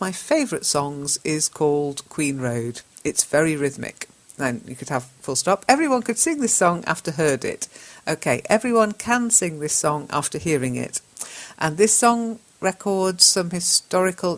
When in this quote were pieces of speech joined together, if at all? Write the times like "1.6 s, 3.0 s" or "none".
none